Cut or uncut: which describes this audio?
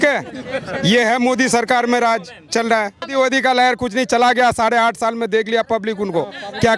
cut